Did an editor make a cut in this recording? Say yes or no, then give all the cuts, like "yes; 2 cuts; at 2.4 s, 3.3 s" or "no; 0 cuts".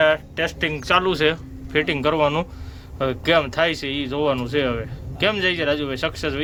no; 0 cuts